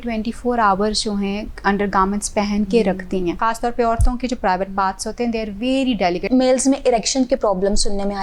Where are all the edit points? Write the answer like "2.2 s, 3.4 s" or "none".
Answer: 3.4 s, 6.2 s